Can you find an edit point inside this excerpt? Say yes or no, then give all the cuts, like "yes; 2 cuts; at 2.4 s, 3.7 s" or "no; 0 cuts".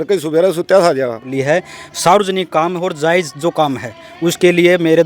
yes; 1 cut; at 1.3 s